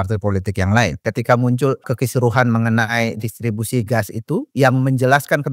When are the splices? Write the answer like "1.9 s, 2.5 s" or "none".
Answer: 1.0 s, 1.9 s